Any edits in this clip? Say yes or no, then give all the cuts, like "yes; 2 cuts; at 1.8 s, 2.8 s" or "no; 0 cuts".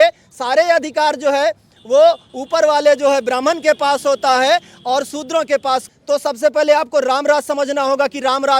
yes; 1 cut; at 5.9 s